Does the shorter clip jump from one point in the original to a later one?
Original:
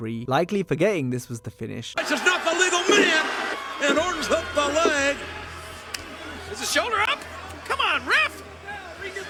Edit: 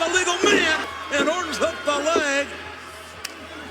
yes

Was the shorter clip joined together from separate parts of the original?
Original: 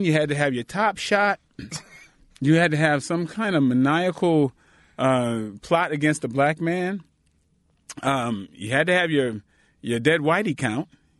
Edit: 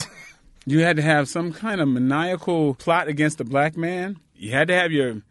yes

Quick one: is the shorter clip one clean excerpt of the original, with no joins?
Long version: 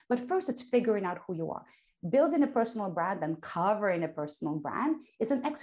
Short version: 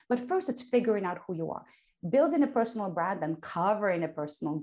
yes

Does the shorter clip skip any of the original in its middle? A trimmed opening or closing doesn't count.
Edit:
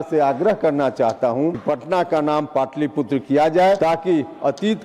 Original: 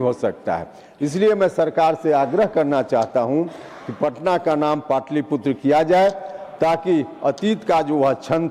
yes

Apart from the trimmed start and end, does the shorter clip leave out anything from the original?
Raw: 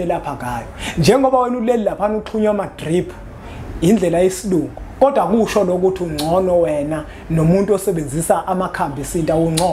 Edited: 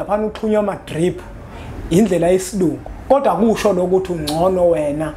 no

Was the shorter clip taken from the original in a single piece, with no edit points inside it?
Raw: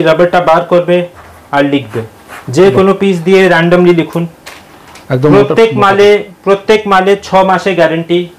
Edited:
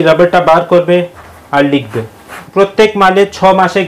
no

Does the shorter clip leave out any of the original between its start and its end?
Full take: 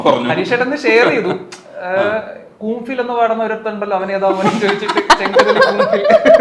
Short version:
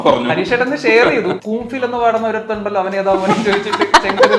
yes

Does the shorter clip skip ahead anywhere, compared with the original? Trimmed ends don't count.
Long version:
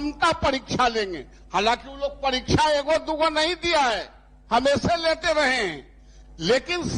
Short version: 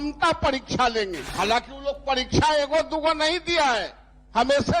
yes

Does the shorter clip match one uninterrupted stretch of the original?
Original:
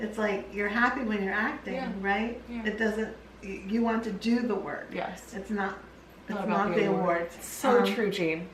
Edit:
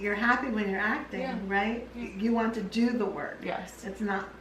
no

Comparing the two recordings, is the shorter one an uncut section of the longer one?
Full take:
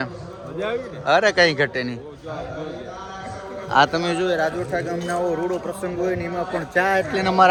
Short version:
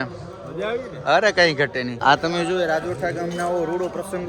no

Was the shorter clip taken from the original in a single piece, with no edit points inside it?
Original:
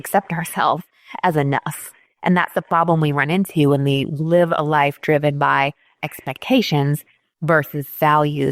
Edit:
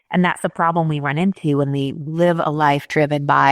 yes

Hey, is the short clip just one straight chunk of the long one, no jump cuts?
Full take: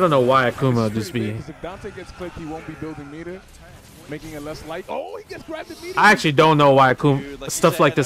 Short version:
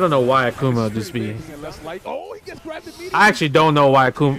no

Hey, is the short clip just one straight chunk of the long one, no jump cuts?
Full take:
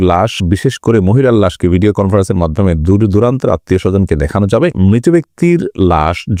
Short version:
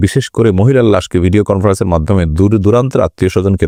yes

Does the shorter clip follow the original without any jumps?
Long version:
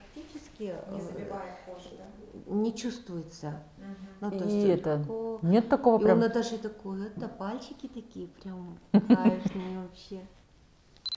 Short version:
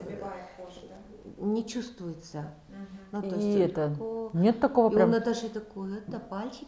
yes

